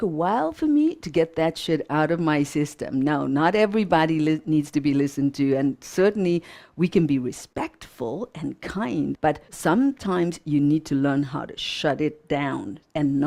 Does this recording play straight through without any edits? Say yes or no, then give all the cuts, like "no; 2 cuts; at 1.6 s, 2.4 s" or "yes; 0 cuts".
no; 1 cut; at 9.2 s